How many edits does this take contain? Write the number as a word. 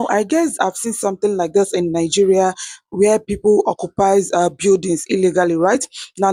zero